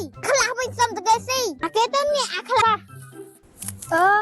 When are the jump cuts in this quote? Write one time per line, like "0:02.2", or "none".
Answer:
0:02.6